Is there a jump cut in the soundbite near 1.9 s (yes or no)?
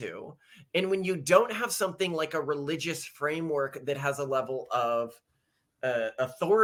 no